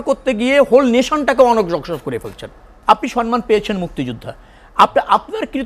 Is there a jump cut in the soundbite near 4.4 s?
no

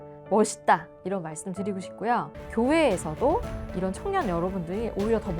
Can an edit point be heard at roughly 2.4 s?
yes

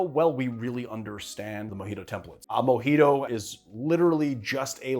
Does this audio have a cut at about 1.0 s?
no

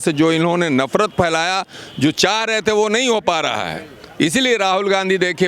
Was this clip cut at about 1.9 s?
no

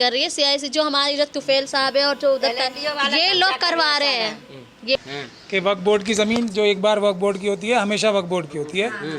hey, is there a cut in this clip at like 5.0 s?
yes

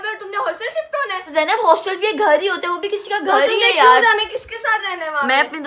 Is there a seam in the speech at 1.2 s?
no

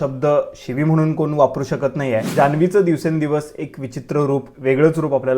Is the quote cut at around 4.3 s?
no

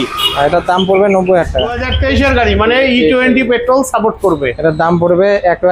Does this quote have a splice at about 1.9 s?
yes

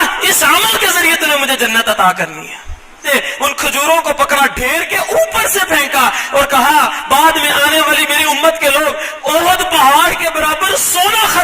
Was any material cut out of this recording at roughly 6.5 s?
no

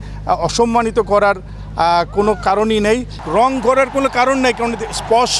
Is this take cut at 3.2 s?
yes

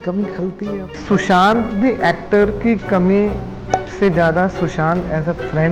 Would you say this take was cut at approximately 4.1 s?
no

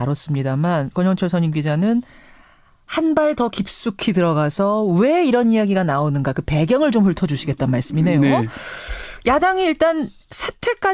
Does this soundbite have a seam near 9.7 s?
no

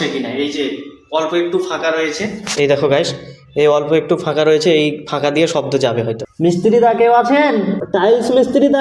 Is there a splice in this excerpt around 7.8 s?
yes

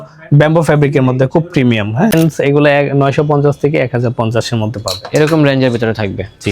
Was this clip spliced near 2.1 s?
yes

